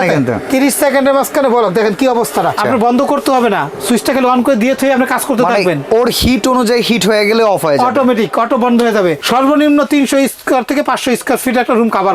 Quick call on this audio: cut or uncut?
cut